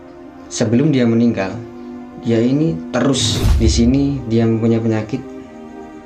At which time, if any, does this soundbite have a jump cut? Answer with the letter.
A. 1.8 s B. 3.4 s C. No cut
B